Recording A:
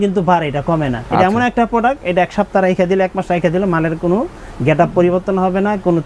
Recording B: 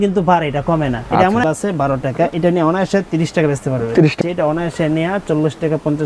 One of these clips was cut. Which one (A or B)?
B